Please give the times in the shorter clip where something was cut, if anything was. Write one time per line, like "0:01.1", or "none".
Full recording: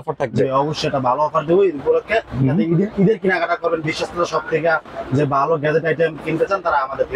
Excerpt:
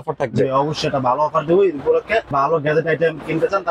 0:02.3